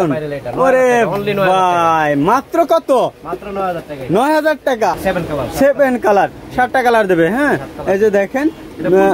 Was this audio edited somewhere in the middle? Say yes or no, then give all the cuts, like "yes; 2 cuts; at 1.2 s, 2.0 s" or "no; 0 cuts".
yes; 1 cut; at 5.0 s